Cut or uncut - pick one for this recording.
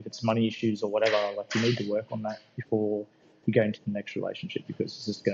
uncut